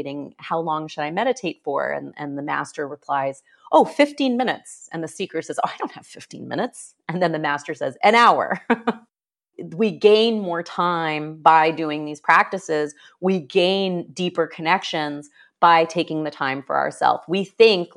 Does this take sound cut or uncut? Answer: cut